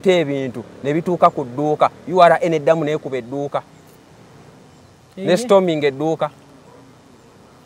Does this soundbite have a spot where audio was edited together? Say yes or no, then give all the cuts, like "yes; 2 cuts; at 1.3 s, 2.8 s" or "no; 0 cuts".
no; 0 cuts